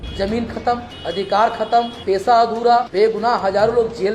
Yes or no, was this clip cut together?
yes